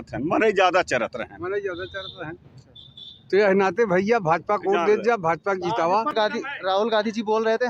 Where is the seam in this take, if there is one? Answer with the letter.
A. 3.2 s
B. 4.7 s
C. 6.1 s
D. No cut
C